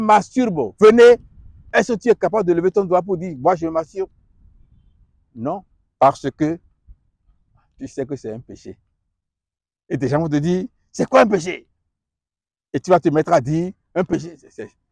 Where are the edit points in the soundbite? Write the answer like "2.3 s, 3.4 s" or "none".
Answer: none